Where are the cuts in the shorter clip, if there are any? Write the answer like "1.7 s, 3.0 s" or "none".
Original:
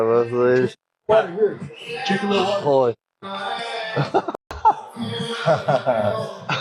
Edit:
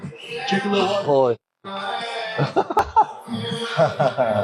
2.8 s